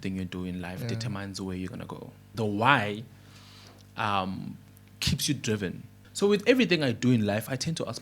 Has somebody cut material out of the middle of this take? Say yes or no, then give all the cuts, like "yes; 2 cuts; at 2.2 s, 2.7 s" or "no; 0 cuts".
yes; 2 cuts; at 2.3 s, 5.9 s